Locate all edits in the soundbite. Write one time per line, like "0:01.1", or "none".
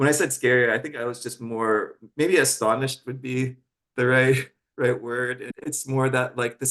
0:05.5